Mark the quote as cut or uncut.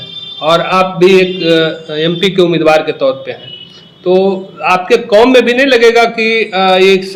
uncut